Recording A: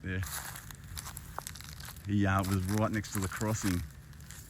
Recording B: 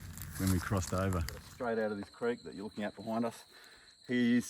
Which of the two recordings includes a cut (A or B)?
B